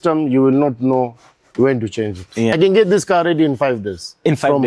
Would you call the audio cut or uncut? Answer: cut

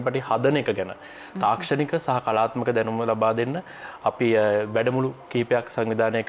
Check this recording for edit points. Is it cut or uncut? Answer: uncut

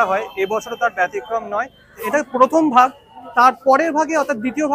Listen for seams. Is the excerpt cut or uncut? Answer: cut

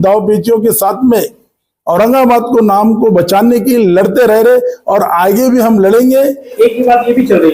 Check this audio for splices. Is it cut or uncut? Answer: cut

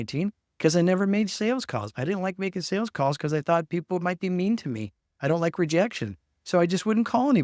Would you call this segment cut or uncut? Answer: uncut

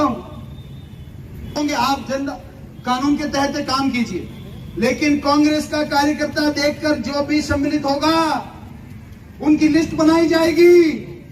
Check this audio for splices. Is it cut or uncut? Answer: cut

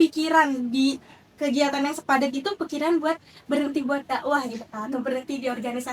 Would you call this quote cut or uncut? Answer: uncut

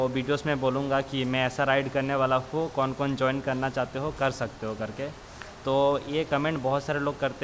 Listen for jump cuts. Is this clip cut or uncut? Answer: uncut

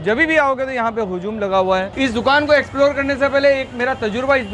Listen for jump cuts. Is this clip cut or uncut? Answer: cut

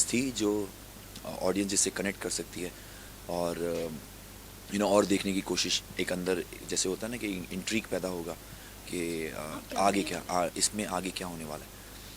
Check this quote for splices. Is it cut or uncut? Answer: uncut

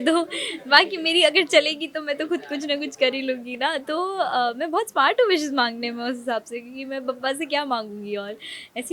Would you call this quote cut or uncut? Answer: uncut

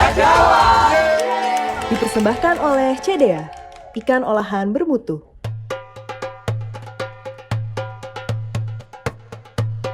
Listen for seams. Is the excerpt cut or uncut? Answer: cut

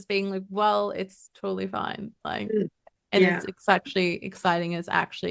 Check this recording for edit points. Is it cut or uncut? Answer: uncut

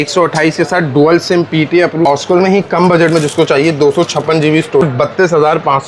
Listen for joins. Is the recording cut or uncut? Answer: cut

